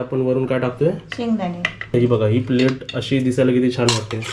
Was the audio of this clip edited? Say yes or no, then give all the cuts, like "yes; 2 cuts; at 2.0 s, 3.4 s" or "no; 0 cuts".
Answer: yes; 1 cut; at 1.9 s